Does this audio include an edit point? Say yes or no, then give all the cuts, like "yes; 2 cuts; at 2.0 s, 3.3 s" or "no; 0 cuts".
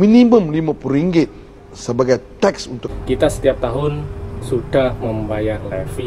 yes; 1 cut; at 2.8 s